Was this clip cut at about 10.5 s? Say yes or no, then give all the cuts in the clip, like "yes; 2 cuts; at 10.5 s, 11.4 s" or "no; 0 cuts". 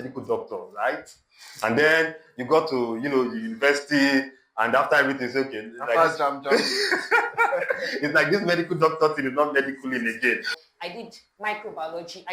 yes; 1 cut; at 10.5 s